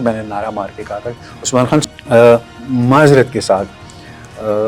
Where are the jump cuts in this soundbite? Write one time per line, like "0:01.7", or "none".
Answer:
0:01.8